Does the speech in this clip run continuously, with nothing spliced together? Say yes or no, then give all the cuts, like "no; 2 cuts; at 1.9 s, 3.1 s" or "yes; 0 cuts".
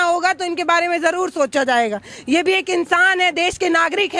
yes; 0 cuts